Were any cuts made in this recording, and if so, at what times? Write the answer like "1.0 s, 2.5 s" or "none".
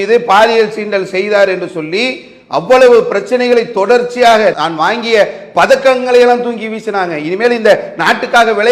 none